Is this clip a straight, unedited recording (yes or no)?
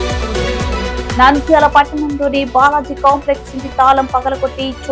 yes